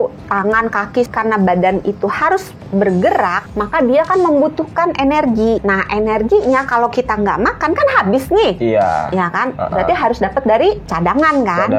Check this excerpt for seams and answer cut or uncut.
cut